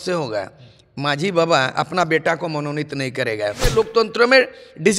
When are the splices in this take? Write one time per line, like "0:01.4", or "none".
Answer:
0:03.7